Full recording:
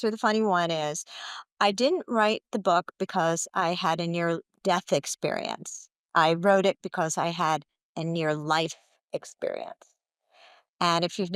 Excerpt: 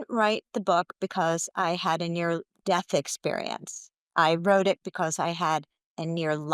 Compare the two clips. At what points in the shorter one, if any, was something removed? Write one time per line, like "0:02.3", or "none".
none